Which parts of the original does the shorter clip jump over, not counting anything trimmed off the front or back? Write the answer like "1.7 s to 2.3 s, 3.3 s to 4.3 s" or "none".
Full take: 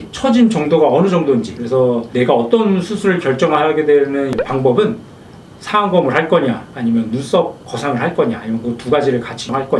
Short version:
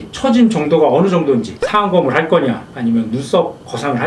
1.5 s to 5.5 s